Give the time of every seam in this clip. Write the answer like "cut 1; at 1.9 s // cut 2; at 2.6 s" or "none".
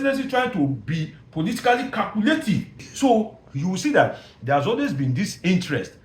cut 1; at 2.9 s